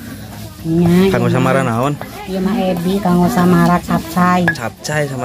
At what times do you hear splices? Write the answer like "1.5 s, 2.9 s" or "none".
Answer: none